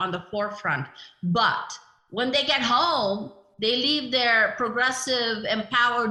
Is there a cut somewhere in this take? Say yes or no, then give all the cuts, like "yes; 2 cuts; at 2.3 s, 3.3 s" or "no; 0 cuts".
no; 0 cuts